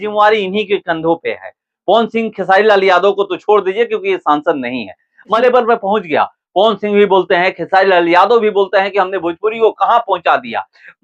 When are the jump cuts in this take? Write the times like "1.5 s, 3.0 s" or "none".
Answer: 5.4 s